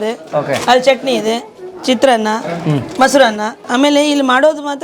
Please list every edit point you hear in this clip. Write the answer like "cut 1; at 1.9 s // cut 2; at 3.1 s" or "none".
cut 1; at 3.7 s